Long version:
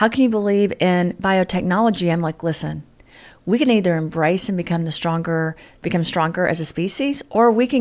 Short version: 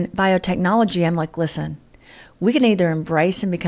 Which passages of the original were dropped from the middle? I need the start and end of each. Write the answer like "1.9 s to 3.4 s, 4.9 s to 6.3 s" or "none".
none